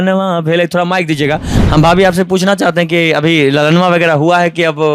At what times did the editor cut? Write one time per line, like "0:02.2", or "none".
0:01.5